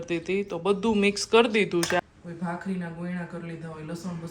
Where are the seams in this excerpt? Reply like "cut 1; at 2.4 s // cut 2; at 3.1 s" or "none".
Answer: cut 1; at 2.0 s

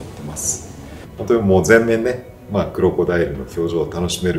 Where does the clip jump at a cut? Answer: cut 1; at 1.1 s

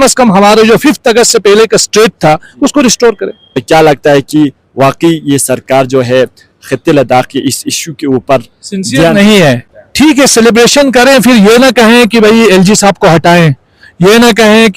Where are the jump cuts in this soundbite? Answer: cut 1; at 3.6 s // cut 2; at 9.7 s

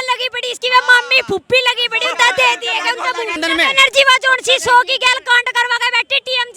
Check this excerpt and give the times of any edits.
cut 1; at 3.4 s

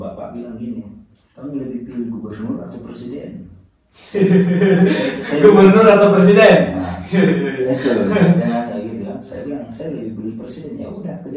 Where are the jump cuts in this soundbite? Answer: none

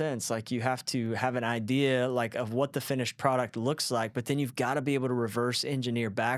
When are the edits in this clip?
none

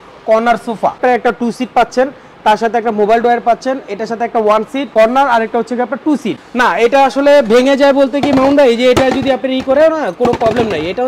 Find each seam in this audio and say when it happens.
cut 1; at 1.0 s // cut 2; at 4.9 s // cut 3; at 6.4 s

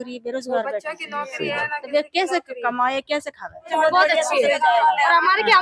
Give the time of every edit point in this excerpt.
cut 1; at 3.7 s

